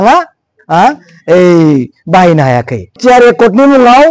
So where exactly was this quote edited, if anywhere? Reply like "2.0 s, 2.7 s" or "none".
3.0 s